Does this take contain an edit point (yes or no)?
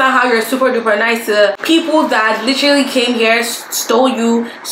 yes